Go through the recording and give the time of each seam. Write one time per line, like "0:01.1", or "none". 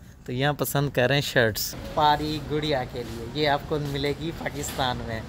0:01.7